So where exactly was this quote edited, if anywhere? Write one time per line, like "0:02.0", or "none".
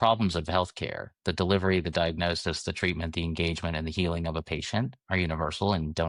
none

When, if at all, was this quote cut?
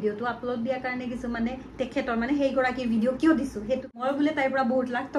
0:04.0

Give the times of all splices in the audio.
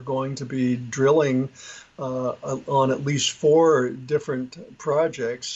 none

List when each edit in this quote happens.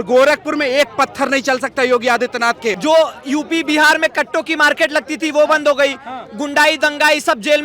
0:02.8

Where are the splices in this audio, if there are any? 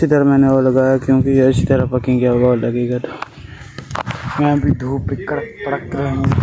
none

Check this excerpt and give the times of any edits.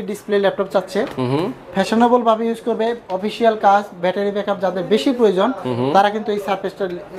none

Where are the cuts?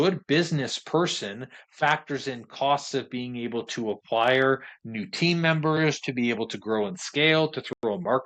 none

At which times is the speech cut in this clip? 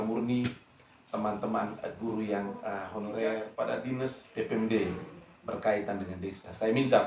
0:03.5

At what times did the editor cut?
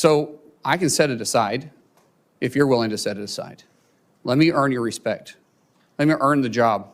none

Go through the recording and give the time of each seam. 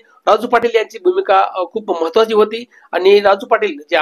none

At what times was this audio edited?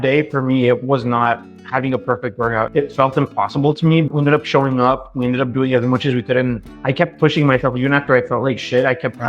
0:02.7
0:04.1
0:06.7

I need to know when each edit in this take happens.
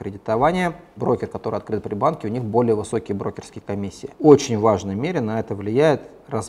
0:01.0
0:04.1

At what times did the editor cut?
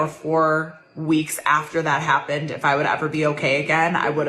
none

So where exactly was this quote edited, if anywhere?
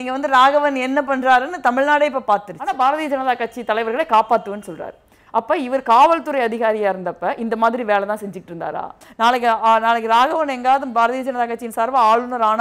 0:02.6
0:09.0

